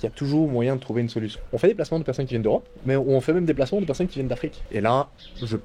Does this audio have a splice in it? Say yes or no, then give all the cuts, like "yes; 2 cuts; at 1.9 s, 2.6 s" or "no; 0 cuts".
yes; 2 cuts; at 1.3 s, 4.6 s